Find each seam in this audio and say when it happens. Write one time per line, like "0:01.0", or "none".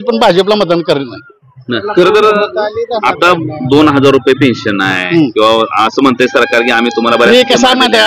none